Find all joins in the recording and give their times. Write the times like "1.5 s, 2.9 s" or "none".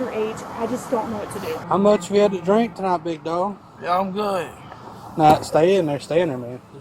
1.6 s